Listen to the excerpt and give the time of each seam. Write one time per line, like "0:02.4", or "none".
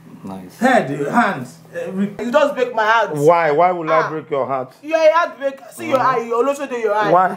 0:02.2